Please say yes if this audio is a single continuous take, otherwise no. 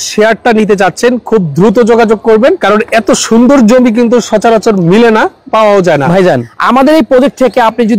no